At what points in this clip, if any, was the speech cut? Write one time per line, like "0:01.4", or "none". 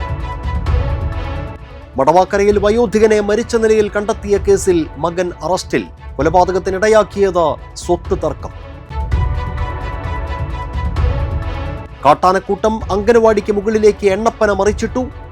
0:01.1